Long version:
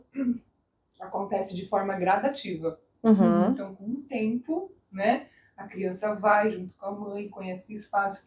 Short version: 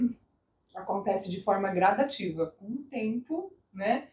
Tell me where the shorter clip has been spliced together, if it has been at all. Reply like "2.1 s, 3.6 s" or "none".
2.6 s